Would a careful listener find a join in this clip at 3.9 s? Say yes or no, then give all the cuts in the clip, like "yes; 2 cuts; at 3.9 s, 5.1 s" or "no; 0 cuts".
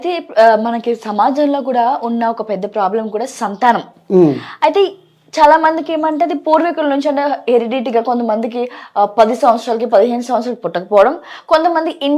no; 0 cuts